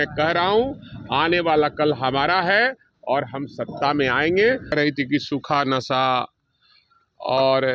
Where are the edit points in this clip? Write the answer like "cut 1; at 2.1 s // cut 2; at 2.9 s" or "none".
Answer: cut 1; at 4.7 s